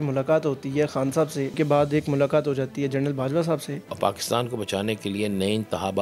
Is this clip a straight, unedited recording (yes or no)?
no